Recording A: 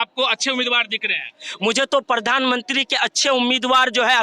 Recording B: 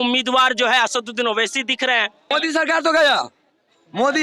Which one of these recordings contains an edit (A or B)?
B